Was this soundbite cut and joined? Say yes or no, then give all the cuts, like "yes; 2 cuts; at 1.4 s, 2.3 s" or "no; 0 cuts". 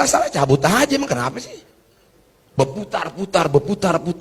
no; 0 cuts